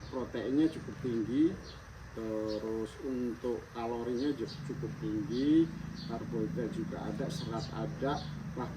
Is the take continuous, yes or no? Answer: yes